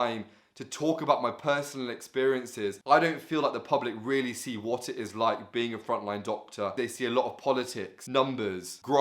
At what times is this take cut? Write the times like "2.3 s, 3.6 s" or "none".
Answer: 2.8 s, 6.7 s, 8.2 s